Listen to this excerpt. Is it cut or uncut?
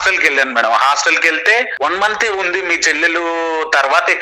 cut